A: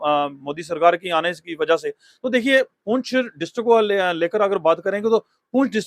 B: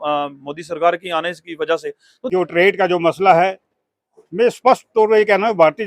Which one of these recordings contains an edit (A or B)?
B